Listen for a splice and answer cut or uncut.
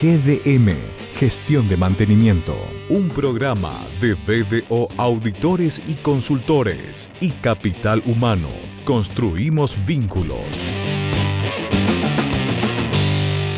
cut